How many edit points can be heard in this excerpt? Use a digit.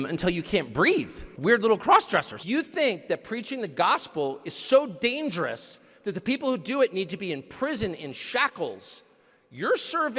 2